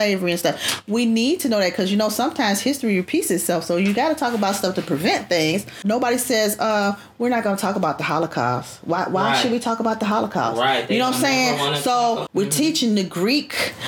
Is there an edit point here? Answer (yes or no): yes